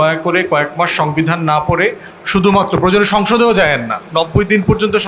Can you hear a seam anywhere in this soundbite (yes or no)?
yes